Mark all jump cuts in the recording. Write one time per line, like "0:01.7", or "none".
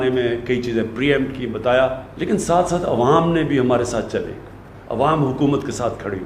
0:02.1